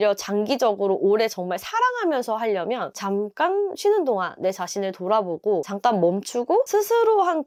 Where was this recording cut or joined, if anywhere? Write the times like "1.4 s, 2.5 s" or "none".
none